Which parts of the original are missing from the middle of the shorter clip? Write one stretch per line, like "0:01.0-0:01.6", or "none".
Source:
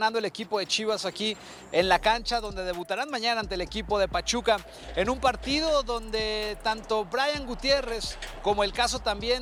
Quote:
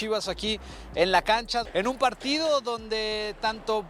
0:02.4-0:04.9